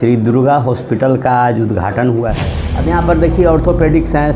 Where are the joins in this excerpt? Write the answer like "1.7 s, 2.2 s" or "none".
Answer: 2.3 s